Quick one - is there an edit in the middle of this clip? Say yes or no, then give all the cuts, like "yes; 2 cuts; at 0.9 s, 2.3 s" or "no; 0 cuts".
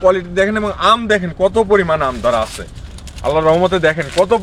no; 0 cuts